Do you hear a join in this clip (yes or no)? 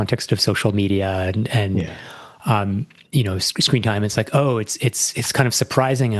no